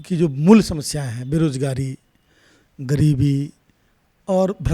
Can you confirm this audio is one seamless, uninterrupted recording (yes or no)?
yes